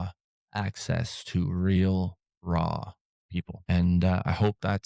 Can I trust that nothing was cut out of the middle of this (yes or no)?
no